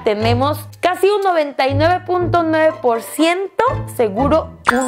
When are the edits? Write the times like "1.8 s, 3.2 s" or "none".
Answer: none